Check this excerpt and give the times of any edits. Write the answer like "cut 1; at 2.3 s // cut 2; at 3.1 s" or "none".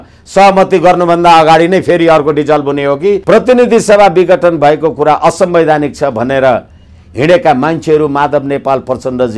cut 1; at 3.2 s